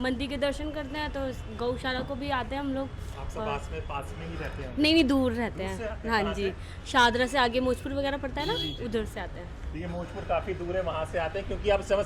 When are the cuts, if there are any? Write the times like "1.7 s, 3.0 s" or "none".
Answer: none